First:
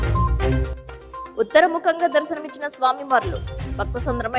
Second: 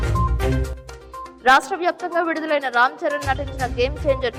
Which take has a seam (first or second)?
first